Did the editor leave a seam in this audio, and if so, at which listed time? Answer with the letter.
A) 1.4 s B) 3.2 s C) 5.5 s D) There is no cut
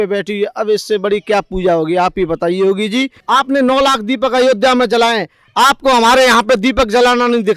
B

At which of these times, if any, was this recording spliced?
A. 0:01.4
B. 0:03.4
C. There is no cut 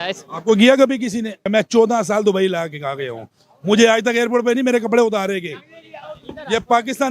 A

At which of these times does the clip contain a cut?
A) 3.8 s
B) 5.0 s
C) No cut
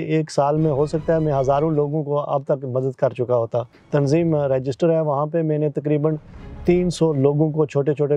A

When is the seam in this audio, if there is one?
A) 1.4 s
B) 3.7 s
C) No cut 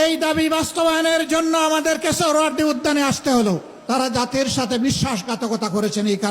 B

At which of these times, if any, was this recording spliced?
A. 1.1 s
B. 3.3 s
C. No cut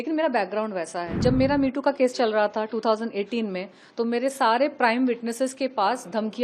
A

